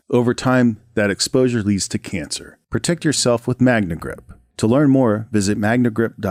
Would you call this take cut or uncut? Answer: uncut